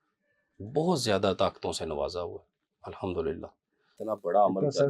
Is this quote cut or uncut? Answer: cut